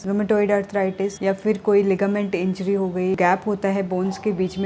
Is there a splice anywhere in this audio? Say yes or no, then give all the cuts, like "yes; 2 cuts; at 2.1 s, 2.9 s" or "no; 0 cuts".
yes; 1 cut; at 3.2 s